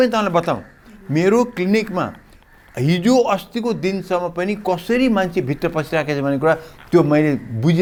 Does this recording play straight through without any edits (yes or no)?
yes